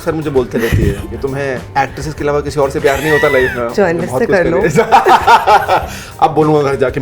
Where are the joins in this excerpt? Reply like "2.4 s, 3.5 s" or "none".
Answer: 1.6 s, 3.7 s